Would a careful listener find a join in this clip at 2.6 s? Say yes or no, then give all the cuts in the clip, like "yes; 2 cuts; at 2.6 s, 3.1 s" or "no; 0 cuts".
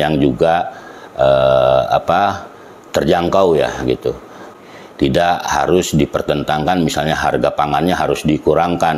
no; 1 cut; at 4.4 s